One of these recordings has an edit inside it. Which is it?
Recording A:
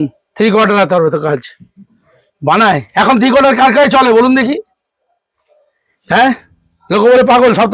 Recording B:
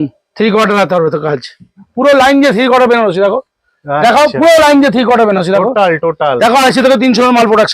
B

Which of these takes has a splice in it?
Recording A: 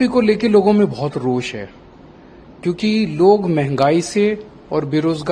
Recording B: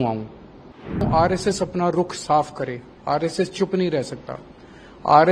B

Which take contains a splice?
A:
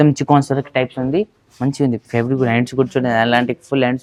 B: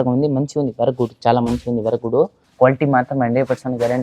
B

